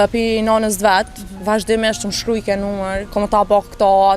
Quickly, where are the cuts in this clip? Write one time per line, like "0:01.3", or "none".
0:03.0